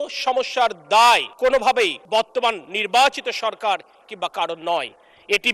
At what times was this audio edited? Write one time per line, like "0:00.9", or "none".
0:01.7